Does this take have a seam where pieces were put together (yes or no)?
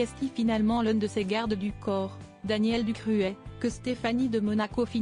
no